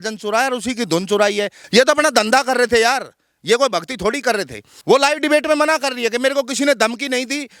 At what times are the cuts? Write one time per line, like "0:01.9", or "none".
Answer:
0:01.6
0:04.7